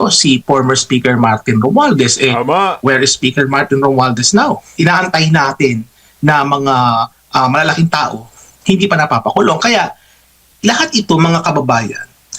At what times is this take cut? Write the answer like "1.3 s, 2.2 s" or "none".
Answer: 4.7 s